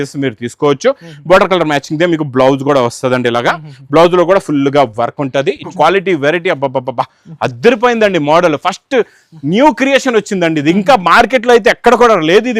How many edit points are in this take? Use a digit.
1